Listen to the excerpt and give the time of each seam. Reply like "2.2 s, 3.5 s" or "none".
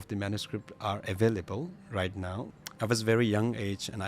2.5 s